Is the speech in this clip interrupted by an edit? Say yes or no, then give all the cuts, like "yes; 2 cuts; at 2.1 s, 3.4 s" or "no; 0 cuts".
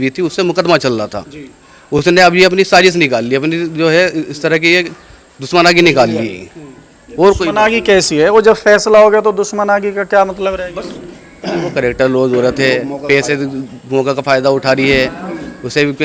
no; 0 cuts